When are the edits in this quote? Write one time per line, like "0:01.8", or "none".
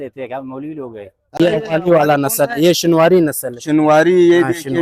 0:01.4